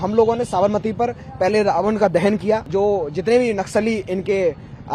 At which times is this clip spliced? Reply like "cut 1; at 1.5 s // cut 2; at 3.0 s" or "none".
cut 1; at 2.7 s